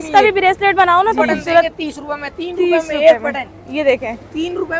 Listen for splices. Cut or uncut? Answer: cut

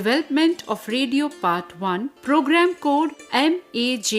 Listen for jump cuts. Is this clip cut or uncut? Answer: cut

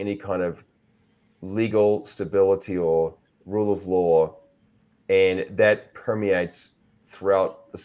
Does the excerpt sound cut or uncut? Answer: uncut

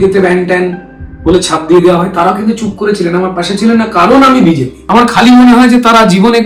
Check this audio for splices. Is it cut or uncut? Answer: cut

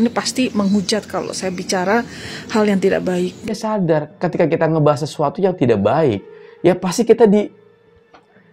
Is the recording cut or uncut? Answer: cut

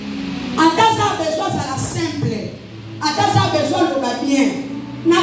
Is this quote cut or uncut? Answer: uncut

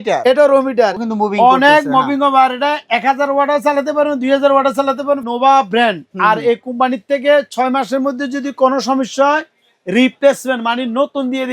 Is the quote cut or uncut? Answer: cut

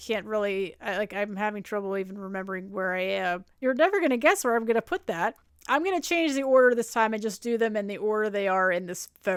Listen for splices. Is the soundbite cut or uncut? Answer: uncut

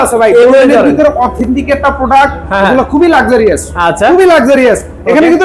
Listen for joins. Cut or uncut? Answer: uncut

